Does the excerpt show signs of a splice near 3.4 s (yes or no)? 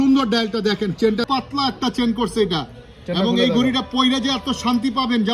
no